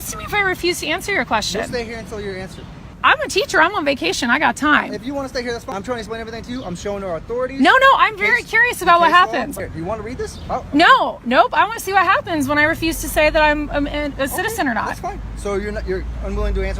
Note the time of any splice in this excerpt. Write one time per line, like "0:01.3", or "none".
0:02.9
0:05.8
0:09.5